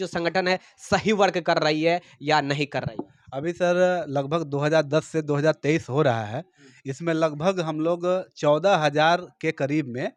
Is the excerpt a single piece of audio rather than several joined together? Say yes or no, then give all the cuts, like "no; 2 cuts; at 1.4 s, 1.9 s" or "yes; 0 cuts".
yes; 0 cuts